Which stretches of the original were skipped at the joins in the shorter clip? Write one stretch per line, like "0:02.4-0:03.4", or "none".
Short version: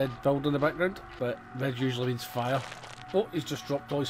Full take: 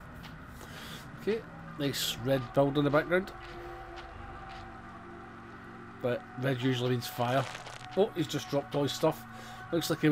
0:03.4-0:05.9